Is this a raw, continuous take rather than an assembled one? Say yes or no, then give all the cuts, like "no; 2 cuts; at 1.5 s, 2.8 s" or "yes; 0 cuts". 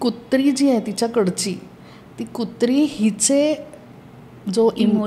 yes; 0 cuts